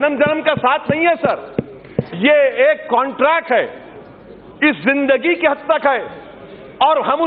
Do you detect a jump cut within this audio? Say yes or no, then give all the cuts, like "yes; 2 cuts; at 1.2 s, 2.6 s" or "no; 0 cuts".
no; 0 cuts